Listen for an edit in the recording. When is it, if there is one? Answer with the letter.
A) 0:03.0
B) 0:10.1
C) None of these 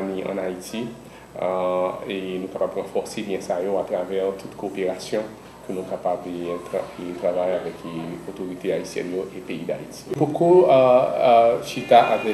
B